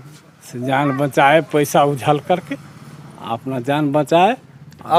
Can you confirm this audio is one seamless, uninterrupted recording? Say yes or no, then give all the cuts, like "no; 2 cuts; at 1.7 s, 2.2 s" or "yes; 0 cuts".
yes; 0 cuts